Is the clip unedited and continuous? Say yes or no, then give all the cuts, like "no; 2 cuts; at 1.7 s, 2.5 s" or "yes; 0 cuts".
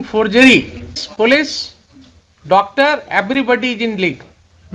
no; 1 cut; at 1.0 s